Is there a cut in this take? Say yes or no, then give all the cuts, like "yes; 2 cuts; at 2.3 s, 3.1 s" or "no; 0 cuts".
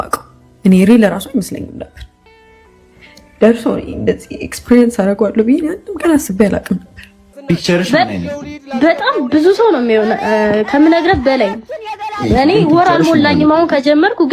yes; 1 cut; at 7.3 s